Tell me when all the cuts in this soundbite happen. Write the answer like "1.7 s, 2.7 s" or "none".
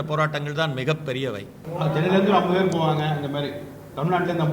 1.6 s